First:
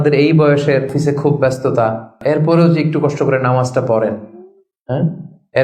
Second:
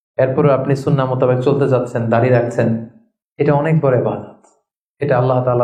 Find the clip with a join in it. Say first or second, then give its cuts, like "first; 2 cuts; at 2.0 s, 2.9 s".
first; 2 cuts; at 0.9 s, 2.2 s